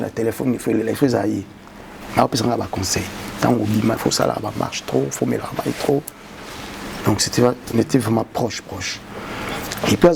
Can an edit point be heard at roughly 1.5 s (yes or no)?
no